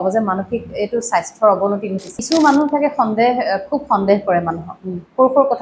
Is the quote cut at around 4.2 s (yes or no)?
no